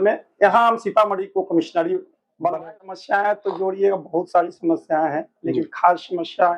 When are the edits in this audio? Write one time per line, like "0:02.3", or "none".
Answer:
0:02.9

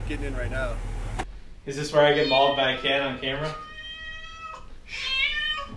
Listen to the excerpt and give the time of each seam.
0:01.3

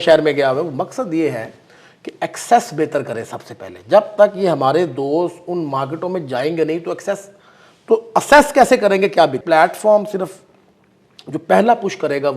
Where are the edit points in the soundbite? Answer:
0:09.4

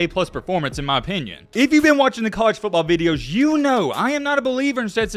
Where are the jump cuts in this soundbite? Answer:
none

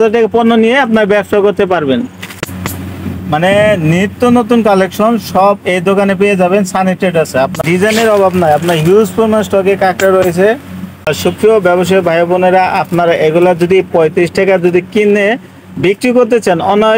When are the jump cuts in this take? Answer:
0:02.2
0:07.6
0:11.1

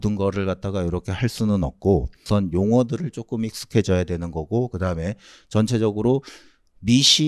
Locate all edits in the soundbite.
0:02.2

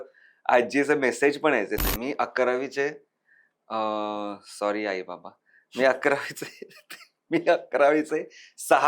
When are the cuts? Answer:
0:01.8

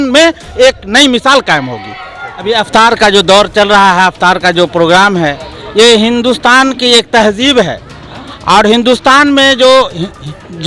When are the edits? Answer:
0:02.3

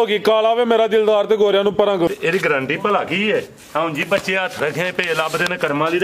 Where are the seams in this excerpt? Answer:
0:02.1

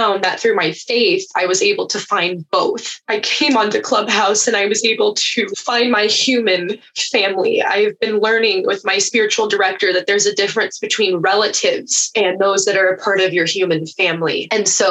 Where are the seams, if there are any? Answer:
0:12.0

